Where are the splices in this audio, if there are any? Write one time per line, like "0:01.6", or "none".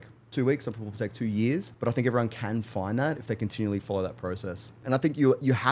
0:01.7
0:04.8